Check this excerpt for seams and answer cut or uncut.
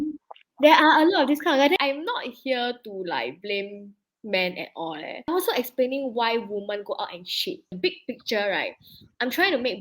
cut